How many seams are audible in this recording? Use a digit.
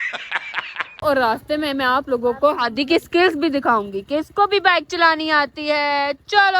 1